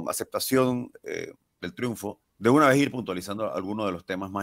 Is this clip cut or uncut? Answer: cut